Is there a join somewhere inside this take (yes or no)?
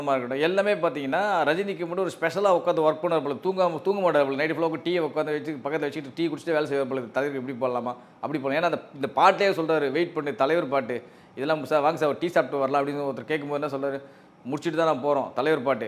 no